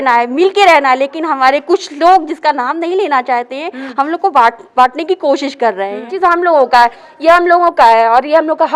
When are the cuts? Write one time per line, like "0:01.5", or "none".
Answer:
0:06.1

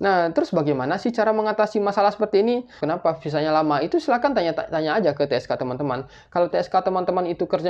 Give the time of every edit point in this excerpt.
0:02.8

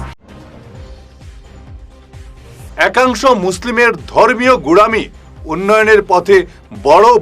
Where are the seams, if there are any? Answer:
0:01.2

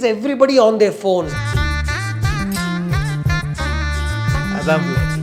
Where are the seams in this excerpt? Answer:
0:01.3

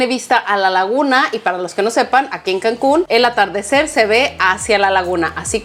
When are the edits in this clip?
none

